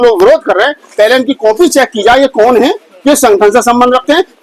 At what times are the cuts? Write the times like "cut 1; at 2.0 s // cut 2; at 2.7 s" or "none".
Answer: none